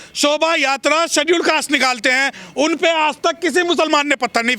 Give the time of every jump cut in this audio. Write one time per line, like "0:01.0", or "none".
none

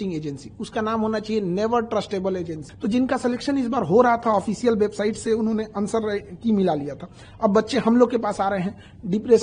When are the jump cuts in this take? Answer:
0:02.6

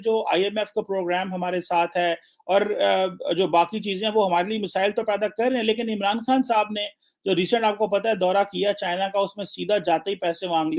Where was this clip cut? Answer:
none

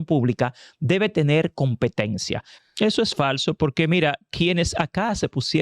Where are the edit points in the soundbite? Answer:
0:02.5

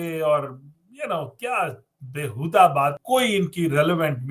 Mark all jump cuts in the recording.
0:03.0

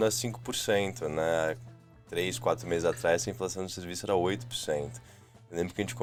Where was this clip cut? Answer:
none

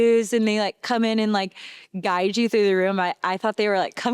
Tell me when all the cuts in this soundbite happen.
none

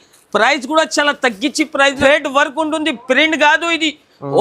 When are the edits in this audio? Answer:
0:02.0

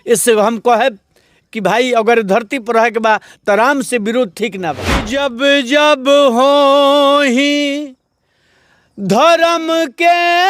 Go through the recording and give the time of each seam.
0:05.0

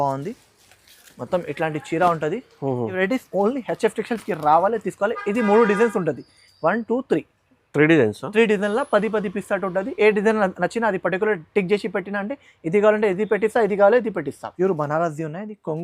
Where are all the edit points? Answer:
0:03.0
0:14.4

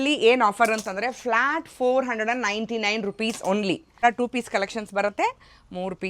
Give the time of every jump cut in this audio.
0:04.0

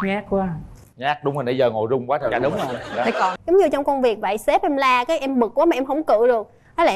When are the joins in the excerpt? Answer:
0:03.3

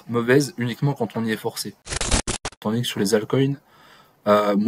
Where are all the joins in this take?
0:02.3

